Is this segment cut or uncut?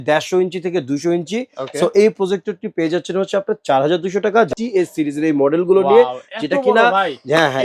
cut